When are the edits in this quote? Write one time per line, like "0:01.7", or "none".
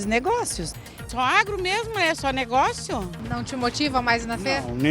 0:01.0
0:03.2